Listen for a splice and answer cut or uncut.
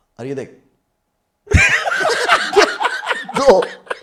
uncut